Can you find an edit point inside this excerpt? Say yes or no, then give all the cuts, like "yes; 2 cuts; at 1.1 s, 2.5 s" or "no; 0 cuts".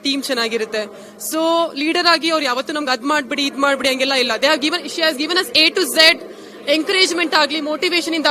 no; 0 cuts